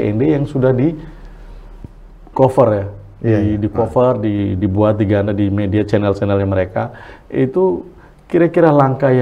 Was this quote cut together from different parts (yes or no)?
no